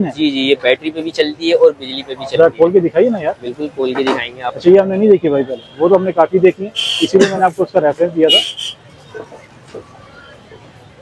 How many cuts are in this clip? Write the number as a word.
zero